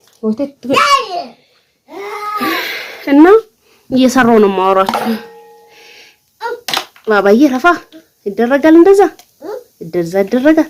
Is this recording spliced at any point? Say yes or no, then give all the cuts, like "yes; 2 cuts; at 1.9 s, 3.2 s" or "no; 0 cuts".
no; 0 cuts